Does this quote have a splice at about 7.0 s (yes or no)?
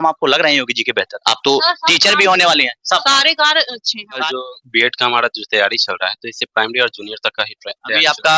no